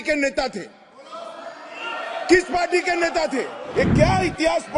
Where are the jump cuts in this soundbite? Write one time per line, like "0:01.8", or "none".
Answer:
0:03.6